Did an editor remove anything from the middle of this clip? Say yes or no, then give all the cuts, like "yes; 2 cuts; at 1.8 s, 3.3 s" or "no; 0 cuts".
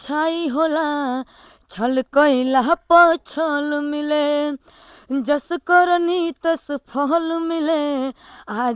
no; 0 cuts